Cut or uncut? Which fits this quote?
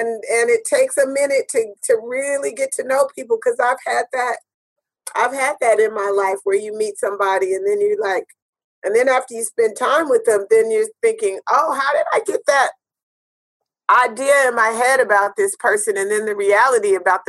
uncut